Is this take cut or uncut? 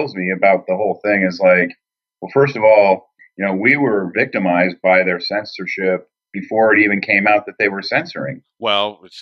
cut